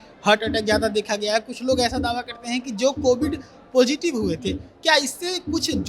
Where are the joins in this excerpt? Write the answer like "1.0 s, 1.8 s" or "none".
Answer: none

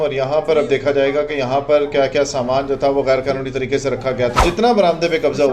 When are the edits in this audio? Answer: 4.4 s

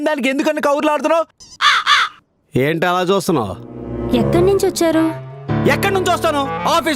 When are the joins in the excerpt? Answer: 1.4 s

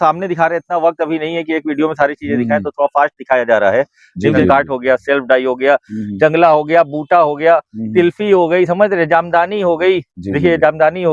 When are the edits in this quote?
4.4 s

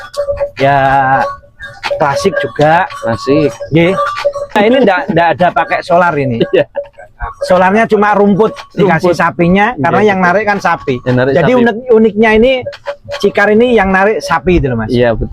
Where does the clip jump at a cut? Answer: 4.6 s

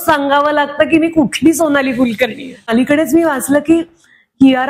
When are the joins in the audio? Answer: 2.7 s

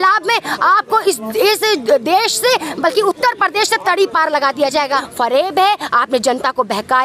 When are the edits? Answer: 5.0 s

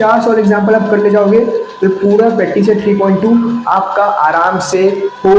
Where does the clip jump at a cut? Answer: none

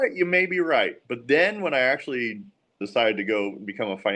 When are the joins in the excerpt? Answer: 2.8 s

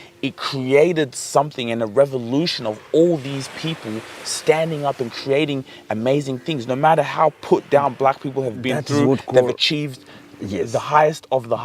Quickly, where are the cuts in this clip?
none

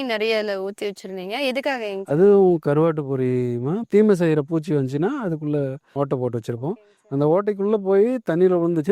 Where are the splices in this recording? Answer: 5.9 s

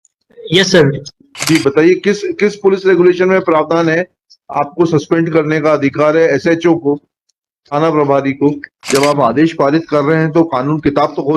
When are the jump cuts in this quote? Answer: 1.3 s, 8.7 s

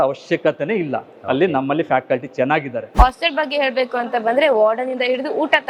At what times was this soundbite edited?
2.8 s

